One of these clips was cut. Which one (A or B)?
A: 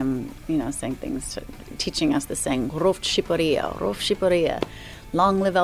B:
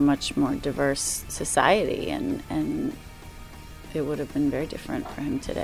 B